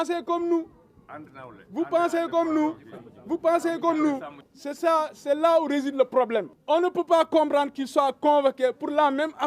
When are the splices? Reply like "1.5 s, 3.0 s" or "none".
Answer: 4.3 s, 6.5 s